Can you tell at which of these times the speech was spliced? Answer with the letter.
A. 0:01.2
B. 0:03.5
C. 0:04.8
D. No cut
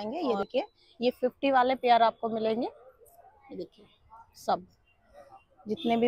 D